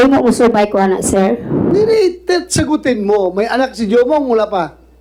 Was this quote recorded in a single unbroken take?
yes; 0 cuts

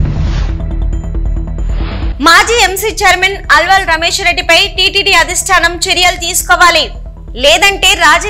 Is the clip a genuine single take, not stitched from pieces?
no; 1 cut; at 2.1 s

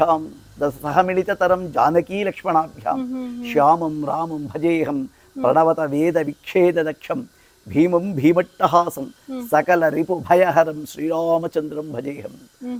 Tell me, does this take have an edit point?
no; 0 cuts

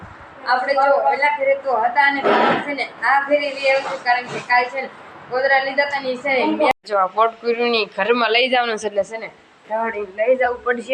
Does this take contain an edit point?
yes; 1 cut; at 6.7 s

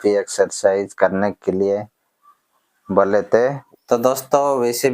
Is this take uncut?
no; 1 cut; at 3.6 s

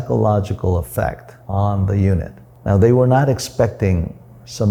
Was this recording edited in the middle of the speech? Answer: no; 0 cuts

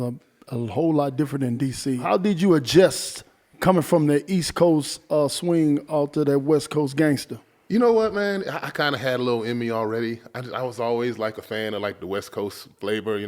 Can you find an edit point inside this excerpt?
yes; 1 cut; at 2.0 s

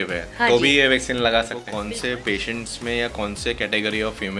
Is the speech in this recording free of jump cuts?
no; 1 cut; at 1.7 s

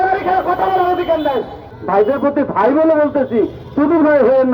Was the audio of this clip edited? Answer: yes; 1 cut; at 1.7 s

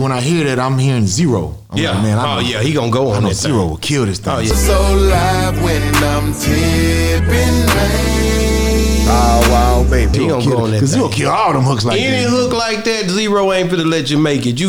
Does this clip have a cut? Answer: no; 0 cuts

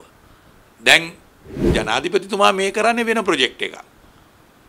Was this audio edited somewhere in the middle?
yes; 1 cut; at 1.7 s

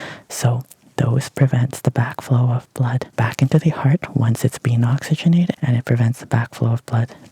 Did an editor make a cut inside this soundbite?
yes; 2 cuts; at 3.1 s, 5.6 s

